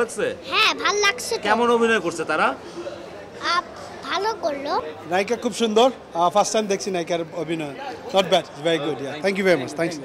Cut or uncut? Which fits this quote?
cut